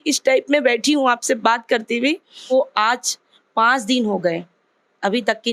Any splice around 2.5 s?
yes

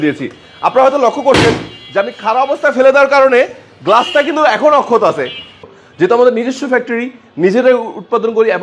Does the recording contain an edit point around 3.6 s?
no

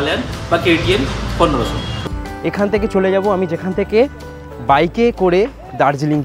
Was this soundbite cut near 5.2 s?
no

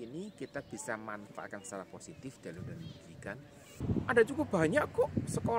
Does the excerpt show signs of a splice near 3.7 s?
yes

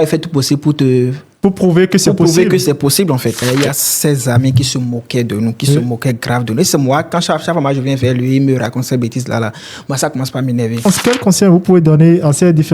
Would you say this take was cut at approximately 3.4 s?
yes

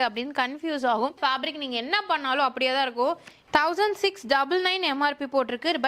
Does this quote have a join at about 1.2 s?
yes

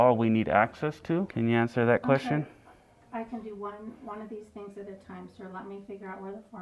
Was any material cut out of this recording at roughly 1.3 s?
yes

